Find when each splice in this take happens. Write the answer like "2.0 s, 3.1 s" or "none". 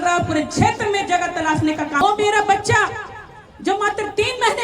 2.0 s